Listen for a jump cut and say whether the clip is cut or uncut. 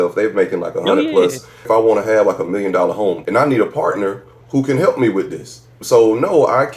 cut